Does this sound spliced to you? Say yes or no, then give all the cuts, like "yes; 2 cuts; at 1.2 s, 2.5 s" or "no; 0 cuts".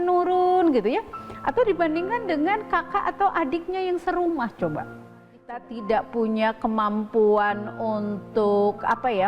yes; 1 cut; at 5.4 s